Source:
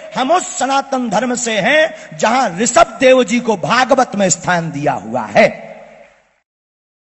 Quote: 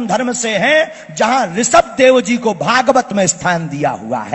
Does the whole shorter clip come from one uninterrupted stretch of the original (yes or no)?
yes